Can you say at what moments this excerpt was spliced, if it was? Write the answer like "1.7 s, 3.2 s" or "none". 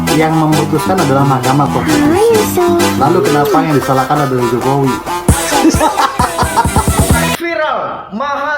7.3 s